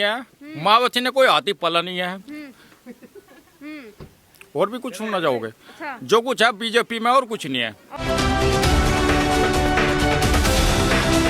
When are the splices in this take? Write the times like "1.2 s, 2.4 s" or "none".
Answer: none